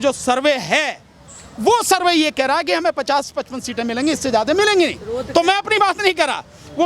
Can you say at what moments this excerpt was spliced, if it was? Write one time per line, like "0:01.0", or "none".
none